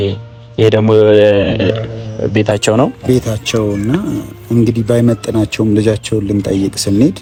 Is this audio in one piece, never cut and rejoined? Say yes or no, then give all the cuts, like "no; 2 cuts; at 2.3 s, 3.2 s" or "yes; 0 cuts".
yes; 0 cuts